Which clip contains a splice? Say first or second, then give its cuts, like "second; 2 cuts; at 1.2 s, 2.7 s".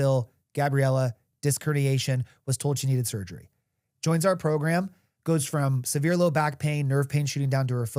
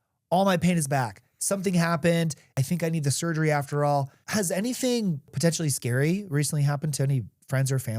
second; 3 cuts; at 2.6 s, 4.2 s, 5.3 s